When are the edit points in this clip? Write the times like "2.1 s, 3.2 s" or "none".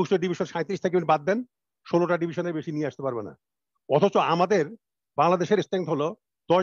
none